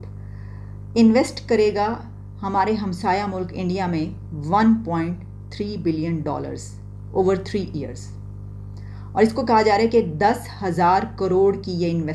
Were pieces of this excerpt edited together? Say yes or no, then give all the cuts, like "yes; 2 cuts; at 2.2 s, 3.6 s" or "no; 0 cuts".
no; 0 cuts